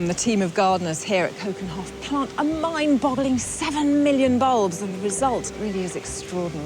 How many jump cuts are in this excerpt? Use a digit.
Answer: 1